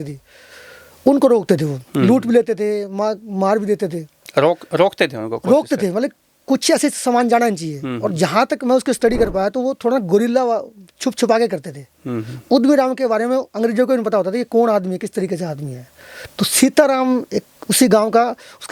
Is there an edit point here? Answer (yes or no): no